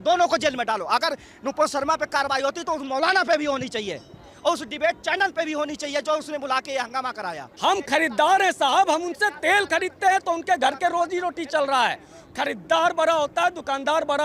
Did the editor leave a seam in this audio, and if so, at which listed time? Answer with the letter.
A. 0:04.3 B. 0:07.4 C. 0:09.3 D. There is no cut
B